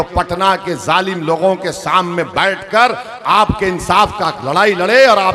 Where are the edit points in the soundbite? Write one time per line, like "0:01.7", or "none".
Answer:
none